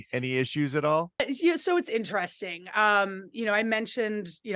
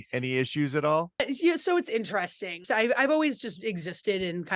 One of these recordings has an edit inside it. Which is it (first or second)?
second